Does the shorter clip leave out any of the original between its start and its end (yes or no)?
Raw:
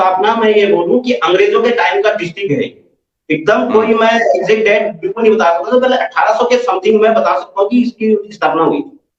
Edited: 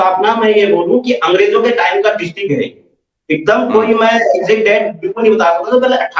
no